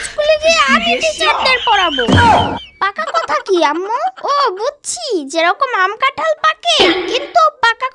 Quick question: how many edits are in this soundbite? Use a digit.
1